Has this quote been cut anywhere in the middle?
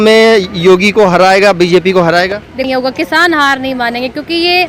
yes; 1 cut; at 2.6 s

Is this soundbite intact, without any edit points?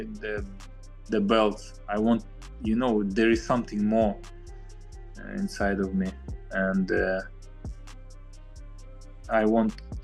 yes; 0 cuts

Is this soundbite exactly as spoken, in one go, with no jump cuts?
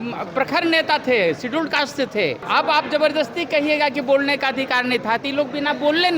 no; 1 cut; at 2.4 s

